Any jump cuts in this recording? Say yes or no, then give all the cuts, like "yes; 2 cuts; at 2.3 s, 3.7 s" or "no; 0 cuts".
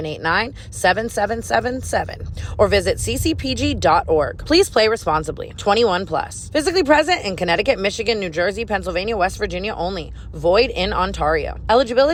no; 0 cuts